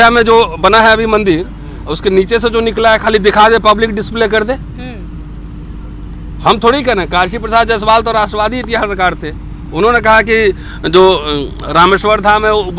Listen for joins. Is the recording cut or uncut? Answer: uncut